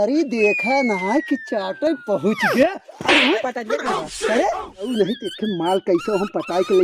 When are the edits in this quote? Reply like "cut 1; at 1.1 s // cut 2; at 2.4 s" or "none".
cut 1; at 4.9 s